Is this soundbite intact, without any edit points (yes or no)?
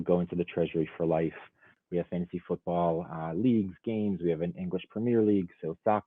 no